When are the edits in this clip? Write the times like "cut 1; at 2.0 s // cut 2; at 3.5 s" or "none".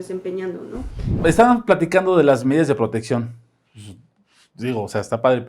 cut 1; at 1.2 s